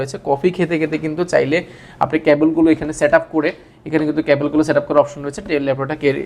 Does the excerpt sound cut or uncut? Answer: uncut